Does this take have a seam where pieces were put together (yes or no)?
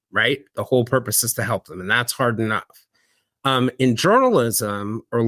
no